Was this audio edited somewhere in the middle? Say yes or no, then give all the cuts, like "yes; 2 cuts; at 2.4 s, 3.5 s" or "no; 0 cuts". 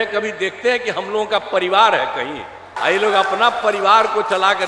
yes; 1 cut; at 2.8 s